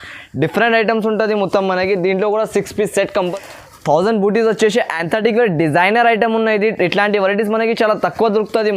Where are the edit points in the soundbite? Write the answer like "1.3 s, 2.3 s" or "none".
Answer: 3.3 s